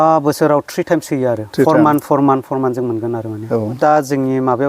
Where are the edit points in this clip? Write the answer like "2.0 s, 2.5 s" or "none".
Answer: 3.8 s